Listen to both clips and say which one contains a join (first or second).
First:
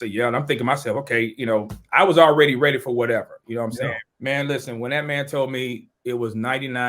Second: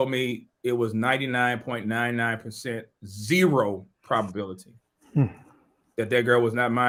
first